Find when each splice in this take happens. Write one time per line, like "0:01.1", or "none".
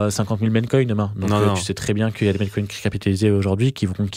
none